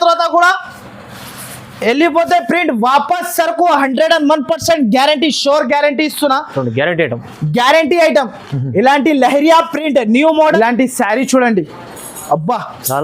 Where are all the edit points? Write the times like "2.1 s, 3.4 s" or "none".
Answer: 10.5 s